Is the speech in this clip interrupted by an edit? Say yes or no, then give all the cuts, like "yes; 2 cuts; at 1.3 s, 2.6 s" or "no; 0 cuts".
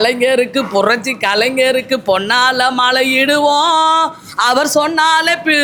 no; 0 cuts